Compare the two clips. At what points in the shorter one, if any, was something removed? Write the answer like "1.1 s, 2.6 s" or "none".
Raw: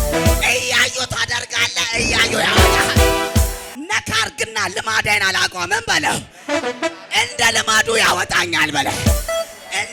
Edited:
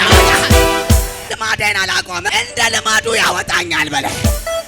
1.2 s, 2.3 s